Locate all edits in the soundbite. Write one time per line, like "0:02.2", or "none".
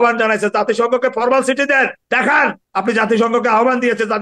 0:02.2